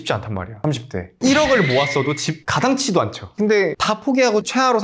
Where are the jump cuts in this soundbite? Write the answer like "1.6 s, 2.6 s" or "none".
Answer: 3.2 s